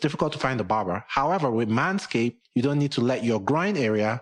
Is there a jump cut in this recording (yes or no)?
yes